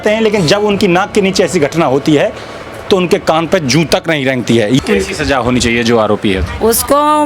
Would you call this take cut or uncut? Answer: cut